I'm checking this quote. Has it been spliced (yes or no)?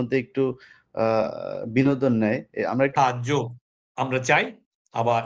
yes